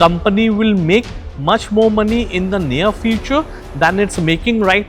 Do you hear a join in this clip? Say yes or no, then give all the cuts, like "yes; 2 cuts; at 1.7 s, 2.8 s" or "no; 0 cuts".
no; 0 cuts